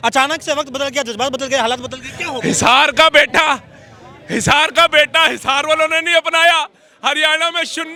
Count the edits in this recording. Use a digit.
0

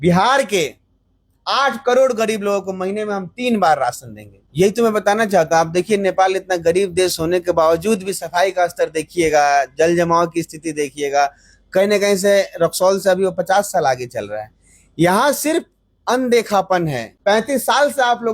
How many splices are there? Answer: 2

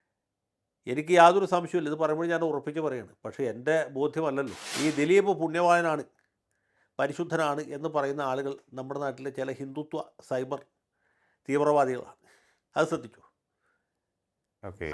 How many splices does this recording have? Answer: 1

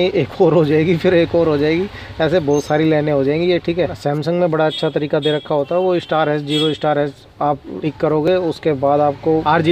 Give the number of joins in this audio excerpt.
1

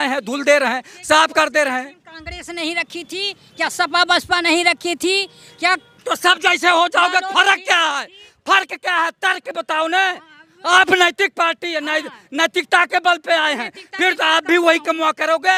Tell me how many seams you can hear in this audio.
0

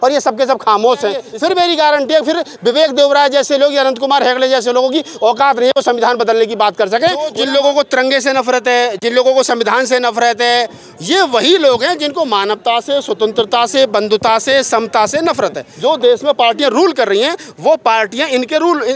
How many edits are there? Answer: 3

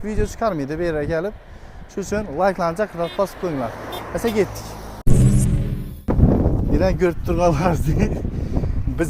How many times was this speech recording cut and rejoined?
0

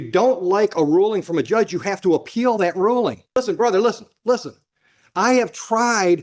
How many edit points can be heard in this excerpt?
1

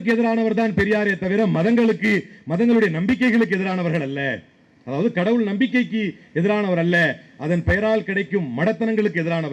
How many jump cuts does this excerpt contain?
0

